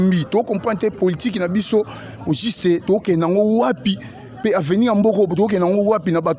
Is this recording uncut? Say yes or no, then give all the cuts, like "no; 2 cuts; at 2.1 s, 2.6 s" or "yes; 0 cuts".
yes; 0 cuts